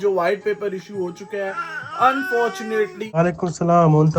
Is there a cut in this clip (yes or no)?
yes